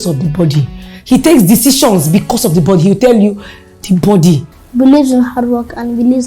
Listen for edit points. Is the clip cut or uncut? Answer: cut